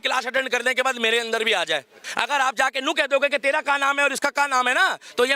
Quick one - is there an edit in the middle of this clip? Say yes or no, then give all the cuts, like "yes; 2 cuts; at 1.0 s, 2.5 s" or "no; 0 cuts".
yes; 1 cut; at 2.0 s